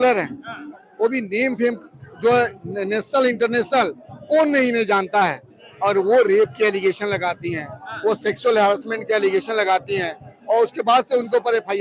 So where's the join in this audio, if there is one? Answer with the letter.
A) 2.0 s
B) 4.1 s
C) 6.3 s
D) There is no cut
D